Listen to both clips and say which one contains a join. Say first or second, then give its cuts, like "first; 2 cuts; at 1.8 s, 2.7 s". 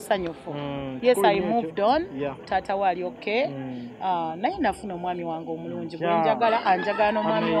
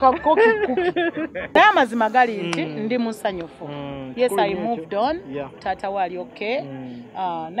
second; 1 cut; at 1.5 s